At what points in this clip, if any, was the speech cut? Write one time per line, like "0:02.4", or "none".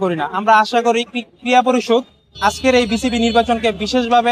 none